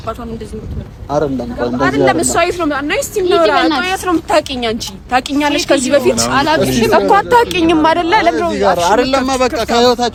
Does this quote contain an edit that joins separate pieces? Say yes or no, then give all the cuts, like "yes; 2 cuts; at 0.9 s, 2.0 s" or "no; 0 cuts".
no; 0 cuts